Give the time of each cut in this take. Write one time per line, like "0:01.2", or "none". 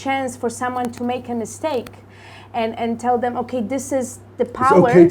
none